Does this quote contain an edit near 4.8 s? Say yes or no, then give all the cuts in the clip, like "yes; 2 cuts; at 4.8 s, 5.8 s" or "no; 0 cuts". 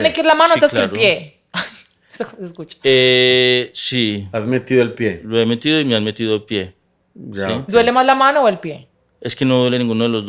no; 0 cuts